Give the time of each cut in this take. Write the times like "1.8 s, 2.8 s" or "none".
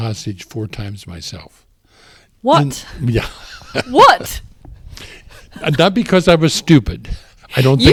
none